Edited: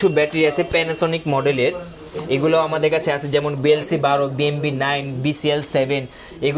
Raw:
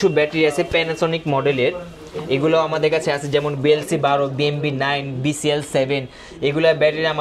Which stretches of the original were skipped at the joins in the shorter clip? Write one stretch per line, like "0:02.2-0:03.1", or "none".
none